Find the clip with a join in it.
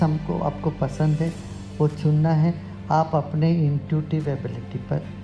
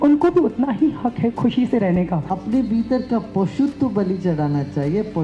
second; 2 cuts; at 1.3 s, 2.2 s

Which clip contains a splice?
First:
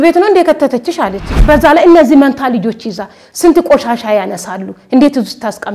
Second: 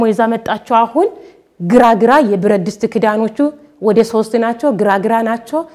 first; 1 cut; at 1.3 s

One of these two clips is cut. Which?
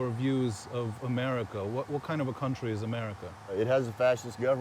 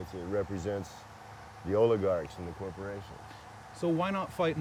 first; 1 cut; at 3.5 s

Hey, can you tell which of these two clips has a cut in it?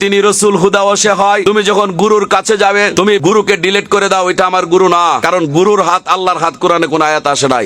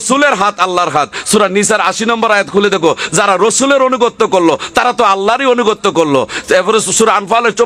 first; 3 cuts; at 1.4 s, 3.1 s, 5.2 s

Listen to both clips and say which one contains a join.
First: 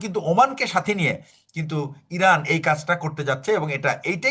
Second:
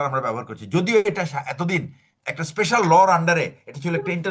second; 1 cut; at 2.1 s

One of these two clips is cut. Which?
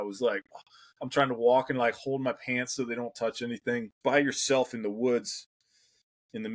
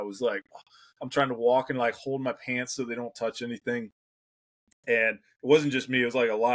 first; 1 cut; at 4.0 s

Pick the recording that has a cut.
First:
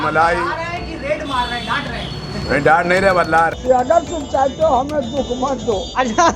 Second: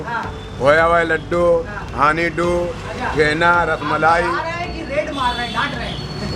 first; 1 cut; at 3.6 s

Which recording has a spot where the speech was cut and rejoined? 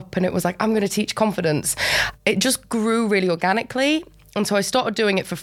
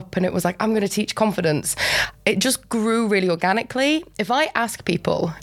second; 1 cut; at 4.1 s

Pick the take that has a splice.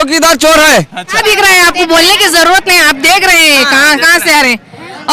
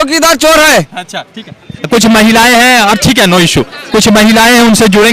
first; 1 cut; at 1.2 s

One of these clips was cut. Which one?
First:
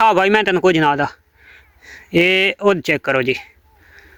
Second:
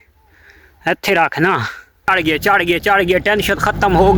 second; 1 cut; at 2.1 s

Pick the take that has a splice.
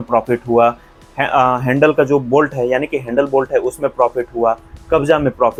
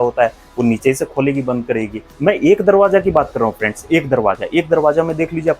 second; 1 cut; at 2.0 s

